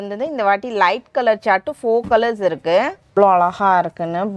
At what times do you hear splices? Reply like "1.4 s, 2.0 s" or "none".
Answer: 3.1 s